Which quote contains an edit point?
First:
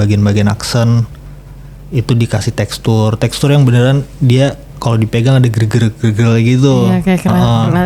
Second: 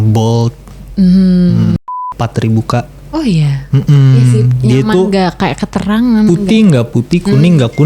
second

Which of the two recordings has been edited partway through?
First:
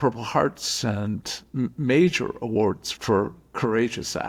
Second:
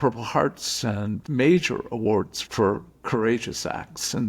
second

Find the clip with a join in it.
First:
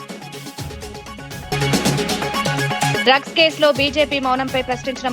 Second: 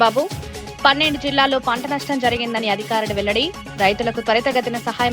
first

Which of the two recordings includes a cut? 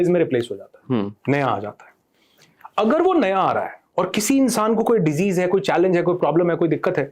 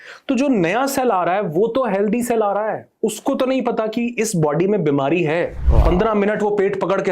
second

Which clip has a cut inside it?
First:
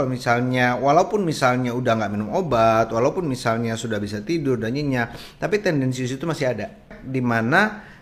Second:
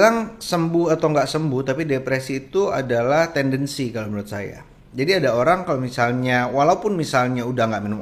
first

